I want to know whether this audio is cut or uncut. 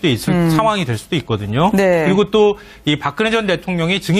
uncut